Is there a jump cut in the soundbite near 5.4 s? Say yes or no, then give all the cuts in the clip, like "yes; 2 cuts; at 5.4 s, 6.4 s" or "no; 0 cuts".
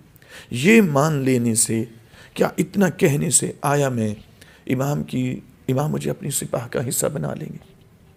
no; 0 cuts